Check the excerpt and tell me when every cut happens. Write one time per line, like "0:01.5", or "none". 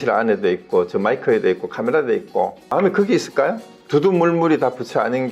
0:02.7
0:03.7